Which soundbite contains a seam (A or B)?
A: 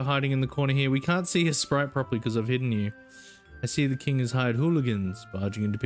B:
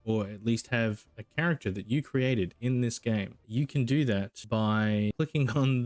B